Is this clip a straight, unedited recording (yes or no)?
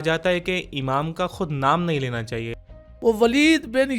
no